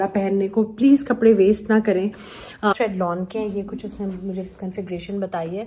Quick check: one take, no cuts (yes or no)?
no